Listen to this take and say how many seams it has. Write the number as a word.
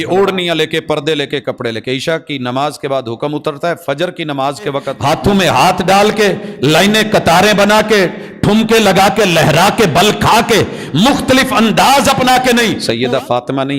two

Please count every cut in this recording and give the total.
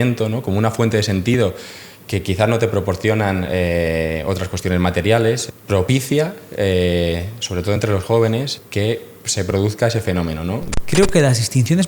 three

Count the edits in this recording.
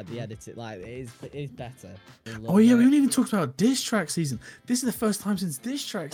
one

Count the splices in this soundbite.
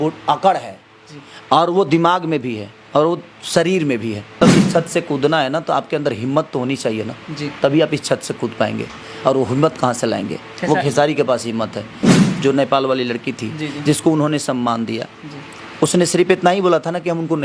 two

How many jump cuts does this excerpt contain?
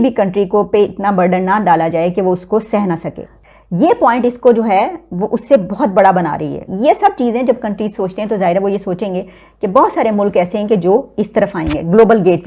one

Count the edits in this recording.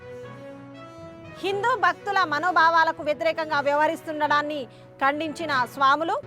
zero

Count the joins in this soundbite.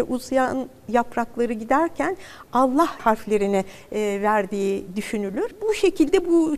two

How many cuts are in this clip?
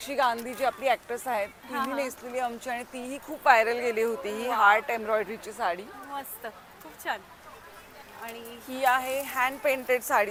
zero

